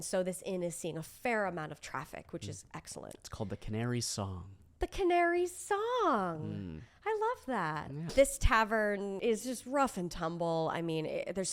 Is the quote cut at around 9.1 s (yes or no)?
yes